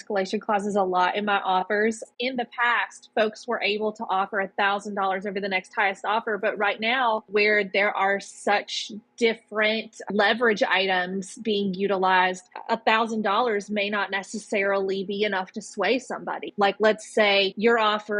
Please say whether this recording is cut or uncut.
uncut